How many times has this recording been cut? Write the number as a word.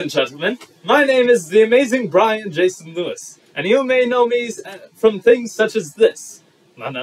zero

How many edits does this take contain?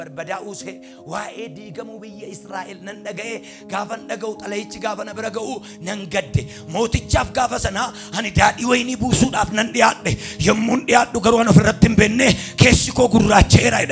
zero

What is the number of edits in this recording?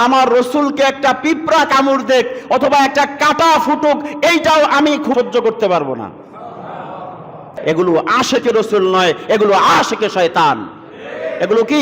two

